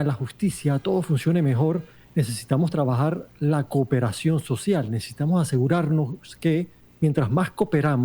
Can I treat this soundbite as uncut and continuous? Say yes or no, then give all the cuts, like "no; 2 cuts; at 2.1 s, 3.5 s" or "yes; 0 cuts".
no; 2 cuts; at 2.0 s, 6.8 s